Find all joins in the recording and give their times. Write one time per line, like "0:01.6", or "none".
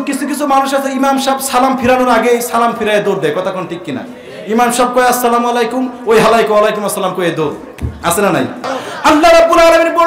0:08.7